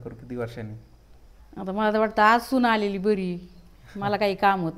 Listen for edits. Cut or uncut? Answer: uncut